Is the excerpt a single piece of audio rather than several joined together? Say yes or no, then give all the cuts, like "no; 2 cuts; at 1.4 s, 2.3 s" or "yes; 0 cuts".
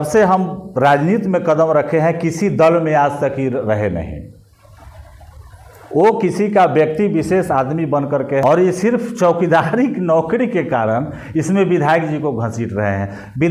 no; 1 cut; at 8.4 s